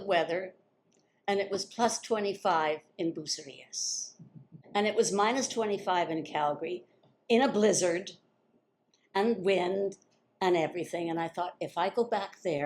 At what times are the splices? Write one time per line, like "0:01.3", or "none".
0:04.6